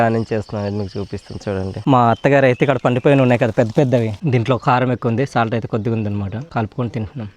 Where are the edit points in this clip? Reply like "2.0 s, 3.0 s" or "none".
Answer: 1.8 s, 4.2 s, 6.5 s